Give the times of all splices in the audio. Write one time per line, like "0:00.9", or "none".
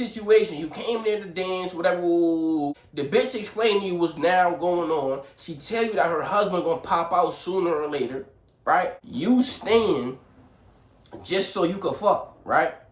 0:02.9
0:09.0